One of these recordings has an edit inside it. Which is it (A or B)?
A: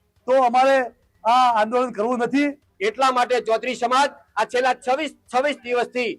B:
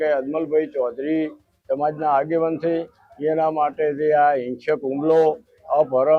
A